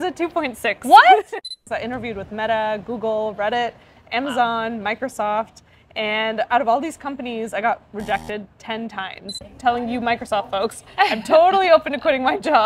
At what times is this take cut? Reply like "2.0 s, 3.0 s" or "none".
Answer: 1.3 s, 9.3 s